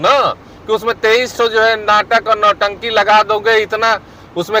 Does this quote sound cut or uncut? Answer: uncut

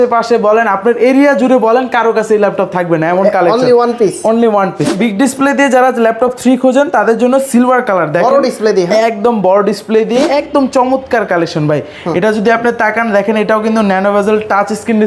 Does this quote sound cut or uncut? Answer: cut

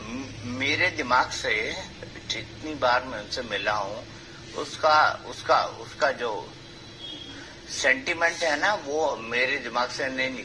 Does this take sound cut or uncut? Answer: uncut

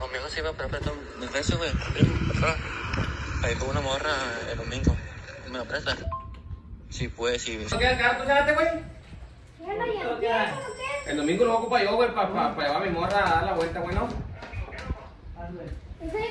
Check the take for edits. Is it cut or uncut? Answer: cut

